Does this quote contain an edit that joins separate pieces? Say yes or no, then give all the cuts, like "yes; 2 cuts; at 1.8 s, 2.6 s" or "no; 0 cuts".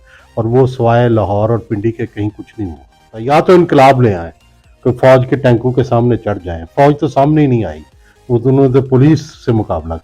yes; 1 cut; at 3.1 s